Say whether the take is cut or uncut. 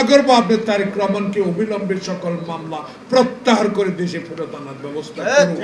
uncut